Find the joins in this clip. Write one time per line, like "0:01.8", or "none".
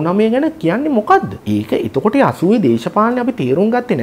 0:01.4